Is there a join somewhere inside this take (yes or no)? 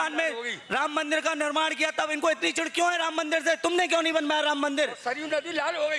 no